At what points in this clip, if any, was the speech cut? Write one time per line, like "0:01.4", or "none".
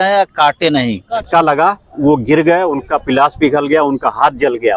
0:01.1